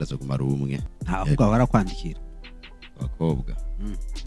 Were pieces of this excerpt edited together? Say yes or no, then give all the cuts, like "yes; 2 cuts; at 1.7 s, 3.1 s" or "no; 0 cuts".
yes; 1 cut; at 0.9 s